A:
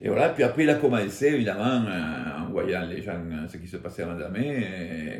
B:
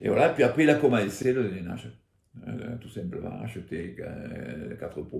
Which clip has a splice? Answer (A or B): B